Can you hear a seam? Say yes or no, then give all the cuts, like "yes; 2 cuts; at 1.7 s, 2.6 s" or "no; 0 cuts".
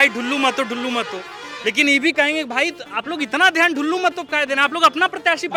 no; 0 cuts